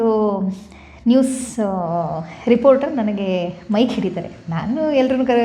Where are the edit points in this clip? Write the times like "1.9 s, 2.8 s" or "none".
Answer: none